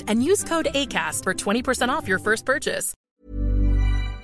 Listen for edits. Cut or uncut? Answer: cut